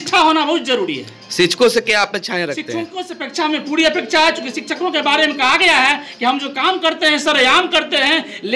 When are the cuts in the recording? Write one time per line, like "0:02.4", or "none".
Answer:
none